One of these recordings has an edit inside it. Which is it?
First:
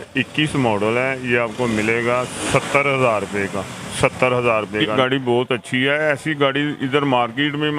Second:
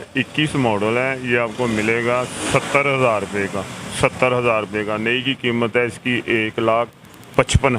first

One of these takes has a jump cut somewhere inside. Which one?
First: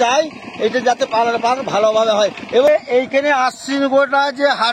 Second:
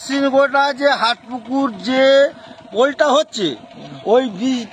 first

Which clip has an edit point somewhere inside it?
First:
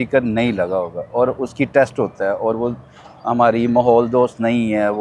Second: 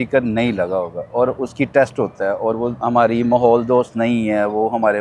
second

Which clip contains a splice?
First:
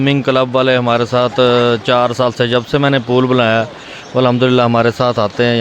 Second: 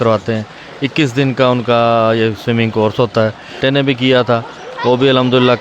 second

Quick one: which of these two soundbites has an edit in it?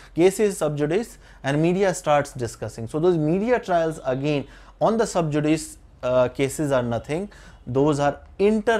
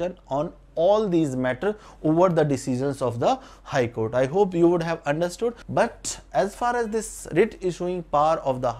second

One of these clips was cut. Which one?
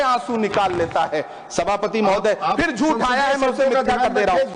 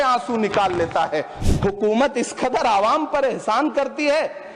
second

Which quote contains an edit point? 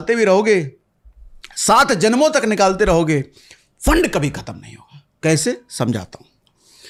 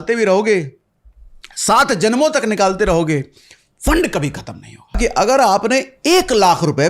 second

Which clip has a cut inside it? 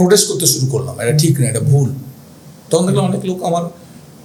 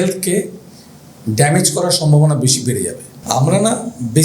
second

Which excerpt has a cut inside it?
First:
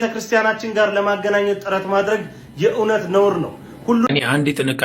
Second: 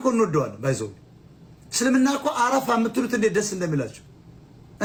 first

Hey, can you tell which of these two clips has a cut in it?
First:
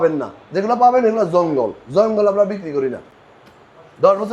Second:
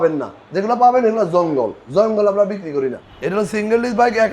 second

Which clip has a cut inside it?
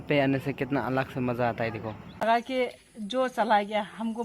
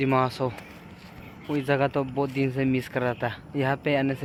first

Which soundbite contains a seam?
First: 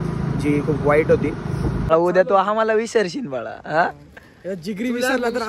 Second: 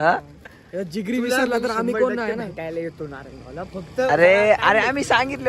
first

